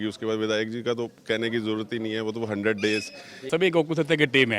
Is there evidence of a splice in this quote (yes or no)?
yes